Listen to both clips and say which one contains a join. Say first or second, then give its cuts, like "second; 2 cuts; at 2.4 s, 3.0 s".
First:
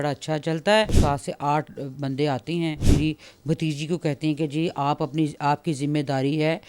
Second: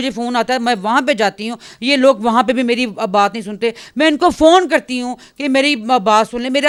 first; 2 cuts; at 0.9 s, 2.8 s